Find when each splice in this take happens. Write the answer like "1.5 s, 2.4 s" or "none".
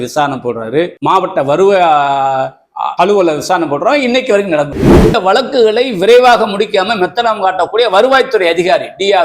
5.2 s